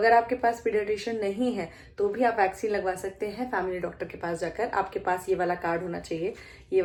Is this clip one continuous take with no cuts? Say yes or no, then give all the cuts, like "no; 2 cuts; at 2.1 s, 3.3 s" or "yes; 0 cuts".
yes; 0 cuts